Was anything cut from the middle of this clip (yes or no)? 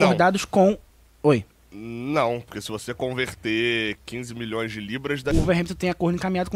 yes